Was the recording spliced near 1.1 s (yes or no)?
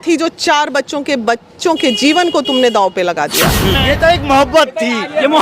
no